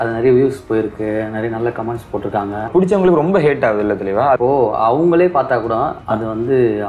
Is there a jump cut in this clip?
yes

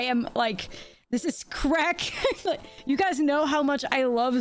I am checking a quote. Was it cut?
yes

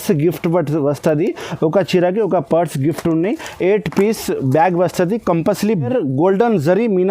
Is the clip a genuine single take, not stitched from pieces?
no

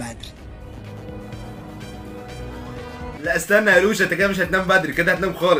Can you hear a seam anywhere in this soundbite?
no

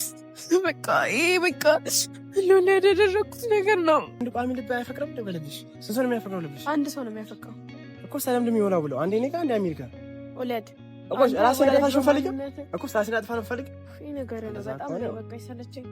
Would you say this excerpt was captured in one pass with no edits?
no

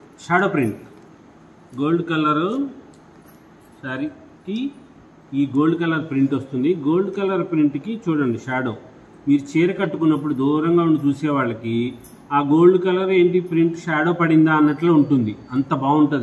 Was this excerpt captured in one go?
yes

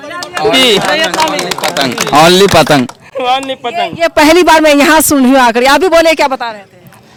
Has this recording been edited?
no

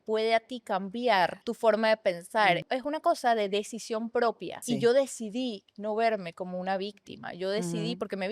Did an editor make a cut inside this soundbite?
yes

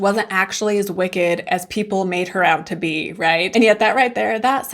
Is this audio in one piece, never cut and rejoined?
no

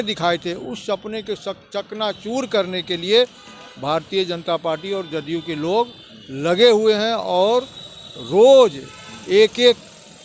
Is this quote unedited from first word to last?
yes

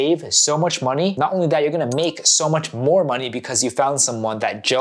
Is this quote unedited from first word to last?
no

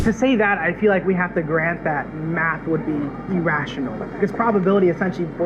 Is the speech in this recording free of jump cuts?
no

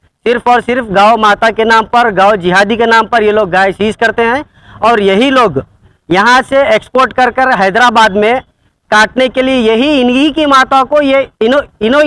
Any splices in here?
no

